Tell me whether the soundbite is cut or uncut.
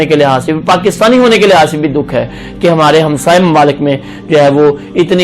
uncut